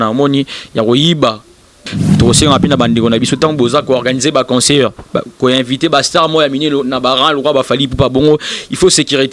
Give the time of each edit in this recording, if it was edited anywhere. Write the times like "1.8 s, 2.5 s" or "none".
2.0 s

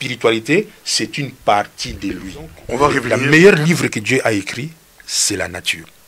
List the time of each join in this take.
3.0 s

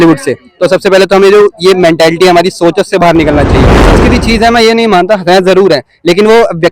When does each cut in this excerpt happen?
3.9 s

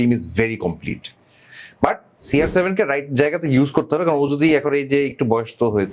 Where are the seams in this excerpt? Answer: none

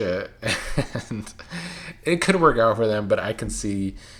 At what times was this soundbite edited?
none

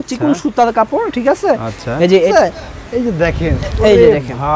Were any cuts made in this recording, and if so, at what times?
2.3 s

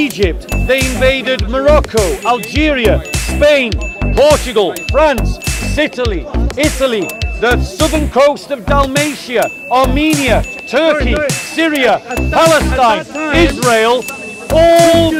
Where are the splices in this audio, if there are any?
none

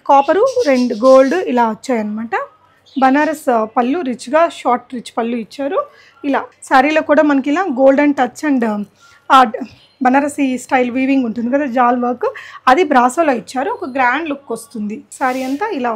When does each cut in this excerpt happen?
6.5 s, 15.1 s

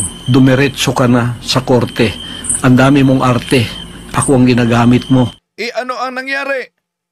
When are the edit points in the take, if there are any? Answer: 5.4 s

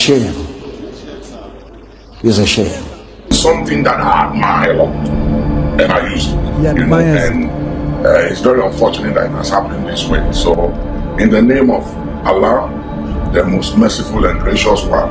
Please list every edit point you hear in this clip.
3.3 s

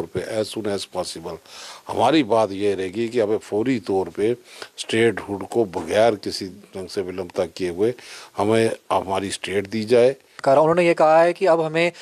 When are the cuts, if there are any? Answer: 10.4 s

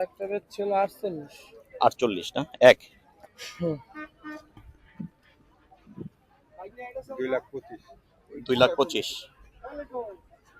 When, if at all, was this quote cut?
4.7 s

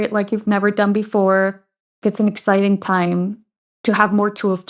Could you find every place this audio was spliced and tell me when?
2.0 s

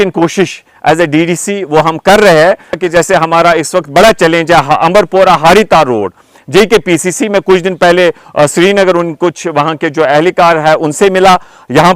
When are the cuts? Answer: 2.8 s

